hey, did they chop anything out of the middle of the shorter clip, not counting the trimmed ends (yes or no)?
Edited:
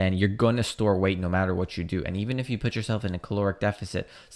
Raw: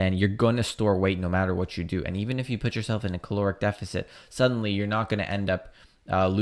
no